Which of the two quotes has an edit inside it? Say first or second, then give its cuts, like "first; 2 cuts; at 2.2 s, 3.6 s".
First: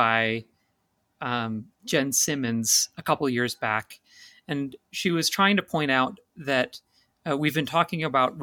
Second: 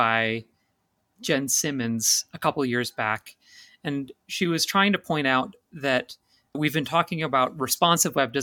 second; 2 cuts; at 1.1 s, 6.6 s